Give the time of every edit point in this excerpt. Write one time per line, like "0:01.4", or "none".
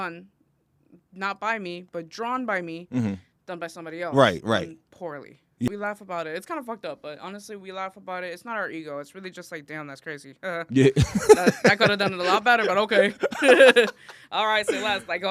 0:05.7